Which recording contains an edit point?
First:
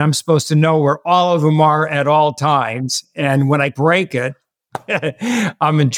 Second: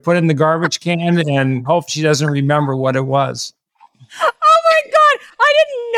first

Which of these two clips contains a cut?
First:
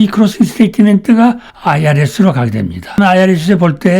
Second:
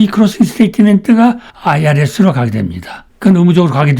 first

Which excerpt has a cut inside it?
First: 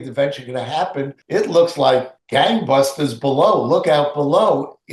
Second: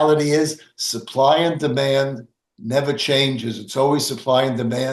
first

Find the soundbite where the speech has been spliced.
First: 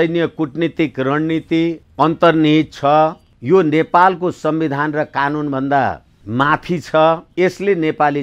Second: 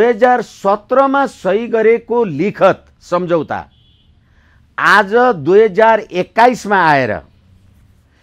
first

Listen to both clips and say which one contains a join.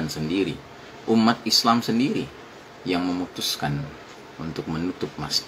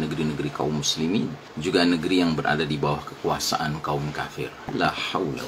second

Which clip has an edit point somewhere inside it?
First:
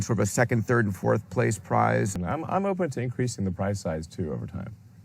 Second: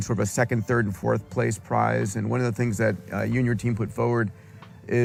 first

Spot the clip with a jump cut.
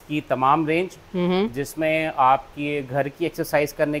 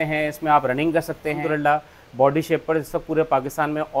second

